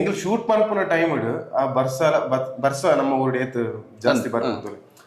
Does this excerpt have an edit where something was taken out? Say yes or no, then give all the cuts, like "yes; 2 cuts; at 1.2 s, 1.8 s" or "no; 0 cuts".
no; 0 cuts